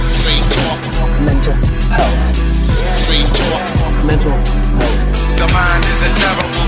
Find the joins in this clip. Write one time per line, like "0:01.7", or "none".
none